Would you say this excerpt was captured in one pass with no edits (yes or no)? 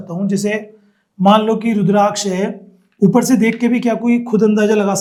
yes